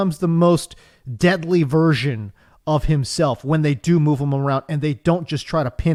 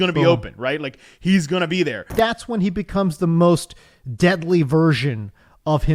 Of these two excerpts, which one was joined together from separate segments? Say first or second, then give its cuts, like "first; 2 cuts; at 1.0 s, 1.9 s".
second; 1 cut; at 2.1 s